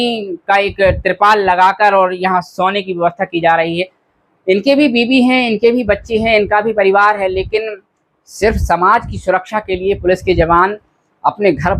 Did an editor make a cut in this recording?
no; 0 cuts

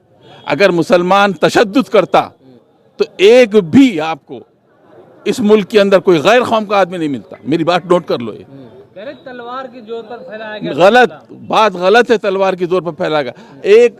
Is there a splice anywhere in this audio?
no; 0 cuts

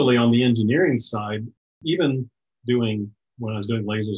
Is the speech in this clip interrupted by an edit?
yes; 2 cuts; at 1.7 s, 3.2 s

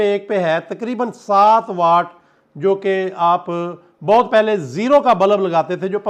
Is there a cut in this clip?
no; 0 cuts

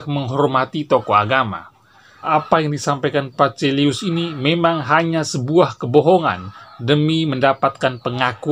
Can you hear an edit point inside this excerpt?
yes; 1 cut; at 2.3 s

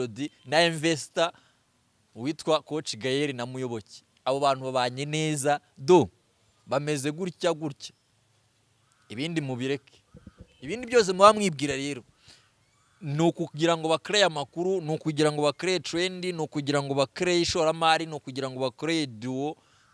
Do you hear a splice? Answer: no; 0 cuts

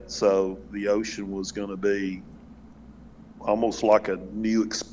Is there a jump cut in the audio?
no; 0 cuts

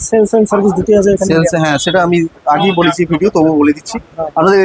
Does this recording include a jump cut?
no; 0 cuts

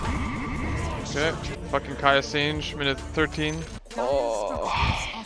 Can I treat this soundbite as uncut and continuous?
no; 2 cuts; at 1.5 s, 3.8 s

